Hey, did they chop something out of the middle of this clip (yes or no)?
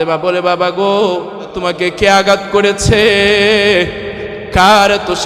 yes